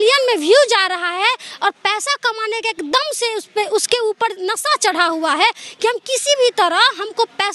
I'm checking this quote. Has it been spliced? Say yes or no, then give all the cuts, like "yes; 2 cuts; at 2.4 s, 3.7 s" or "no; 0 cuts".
no; 0 cuts